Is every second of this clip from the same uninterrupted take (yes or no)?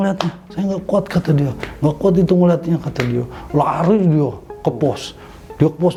yes